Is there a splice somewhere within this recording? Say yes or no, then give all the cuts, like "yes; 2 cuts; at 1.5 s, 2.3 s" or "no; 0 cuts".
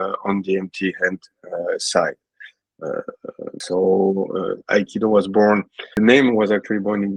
no; 0 cuts